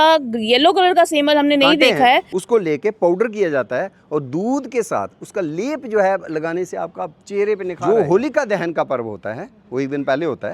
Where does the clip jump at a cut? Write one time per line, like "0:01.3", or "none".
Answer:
0:02.3
0:07.8